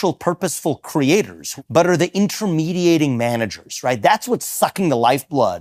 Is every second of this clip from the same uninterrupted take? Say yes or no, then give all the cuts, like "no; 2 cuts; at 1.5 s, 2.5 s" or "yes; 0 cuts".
no; 1 cut; at 1.4 s